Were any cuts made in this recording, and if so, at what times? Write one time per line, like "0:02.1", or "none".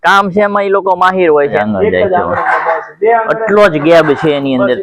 0:01.6